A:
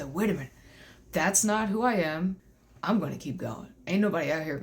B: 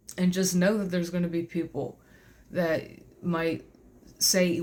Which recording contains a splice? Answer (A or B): A